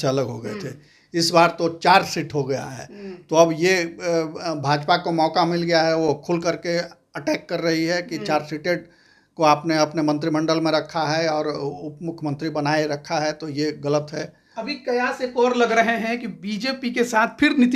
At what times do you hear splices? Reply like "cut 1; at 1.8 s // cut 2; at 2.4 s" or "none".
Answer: none